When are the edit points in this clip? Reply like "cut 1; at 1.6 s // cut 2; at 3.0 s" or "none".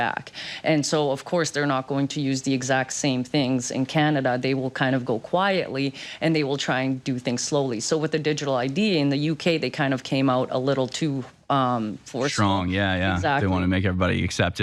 none